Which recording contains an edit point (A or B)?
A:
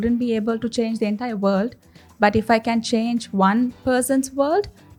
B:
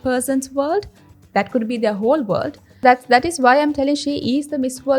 B